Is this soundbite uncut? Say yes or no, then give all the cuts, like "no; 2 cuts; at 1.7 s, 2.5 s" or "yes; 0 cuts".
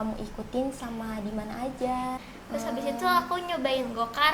no; 1 cut; at 2.2 s